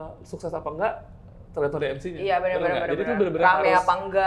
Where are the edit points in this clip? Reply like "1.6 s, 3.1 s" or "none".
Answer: none